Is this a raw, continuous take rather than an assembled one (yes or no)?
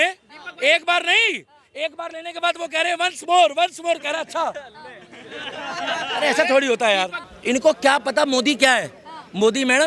no